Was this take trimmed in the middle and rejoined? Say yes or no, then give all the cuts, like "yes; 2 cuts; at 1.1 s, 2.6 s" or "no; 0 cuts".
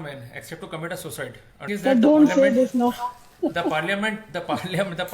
yes; 1 cut; at 1.7 s